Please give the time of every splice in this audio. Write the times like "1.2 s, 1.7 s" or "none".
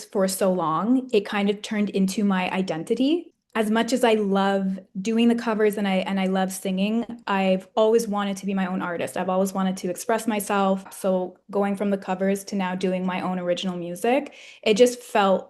3.4 s, 10.9 s